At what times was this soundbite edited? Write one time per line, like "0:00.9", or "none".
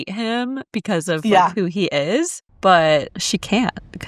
0:02.4
0:03.2